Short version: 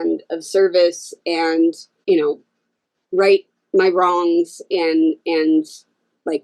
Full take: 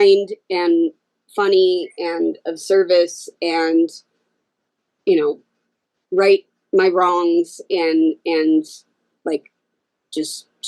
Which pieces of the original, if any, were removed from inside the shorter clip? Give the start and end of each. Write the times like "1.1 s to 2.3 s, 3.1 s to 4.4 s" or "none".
4.0 s to 4.9 s